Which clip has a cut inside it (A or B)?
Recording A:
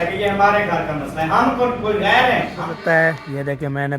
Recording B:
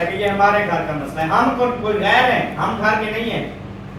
A